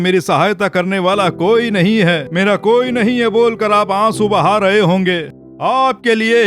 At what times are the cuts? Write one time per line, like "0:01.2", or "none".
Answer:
0:05.4